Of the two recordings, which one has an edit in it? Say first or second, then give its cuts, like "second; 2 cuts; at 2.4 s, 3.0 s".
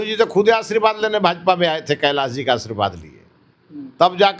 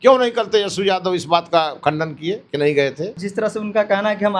second; 1 cut; at 3.2 s